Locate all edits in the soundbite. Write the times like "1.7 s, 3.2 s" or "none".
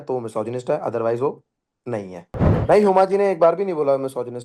2.5 s